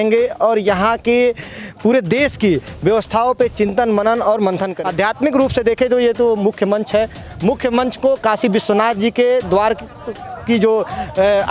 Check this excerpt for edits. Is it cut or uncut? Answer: cut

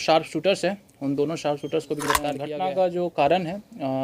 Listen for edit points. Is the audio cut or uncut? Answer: cut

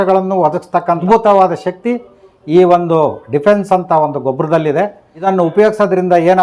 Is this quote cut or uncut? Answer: cut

